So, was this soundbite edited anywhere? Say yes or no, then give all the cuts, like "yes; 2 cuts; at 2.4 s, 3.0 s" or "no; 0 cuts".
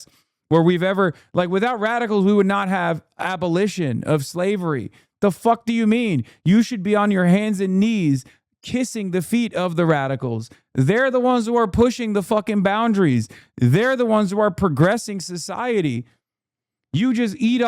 no; 0 cuts